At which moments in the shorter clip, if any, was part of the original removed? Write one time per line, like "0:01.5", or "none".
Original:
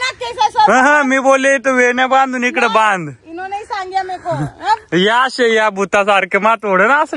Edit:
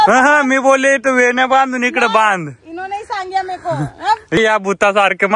0:04.4